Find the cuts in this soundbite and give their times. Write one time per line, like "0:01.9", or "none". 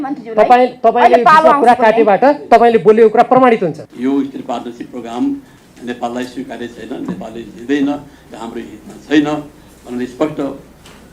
0:03.9